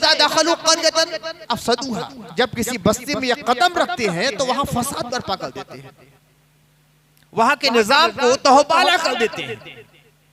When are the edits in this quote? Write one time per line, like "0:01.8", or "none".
none